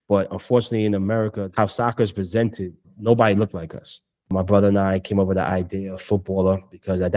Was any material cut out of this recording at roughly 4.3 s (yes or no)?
yes